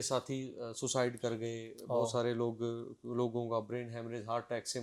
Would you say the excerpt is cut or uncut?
uncut